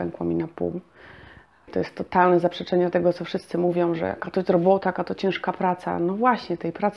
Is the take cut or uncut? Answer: cut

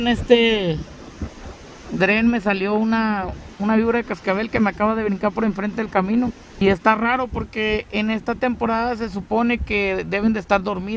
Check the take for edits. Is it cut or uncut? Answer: cut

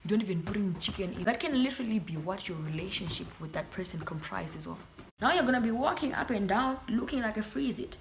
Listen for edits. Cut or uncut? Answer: cut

